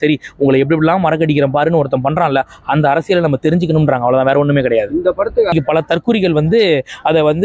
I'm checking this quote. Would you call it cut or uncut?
cut